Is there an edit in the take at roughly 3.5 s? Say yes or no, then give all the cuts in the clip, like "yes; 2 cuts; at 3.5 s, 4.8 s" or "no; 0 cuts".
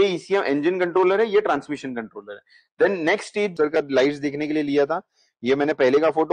yes; 1 cut; at 3.5 s